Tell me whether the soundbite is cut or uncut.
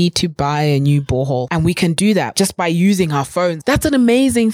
cut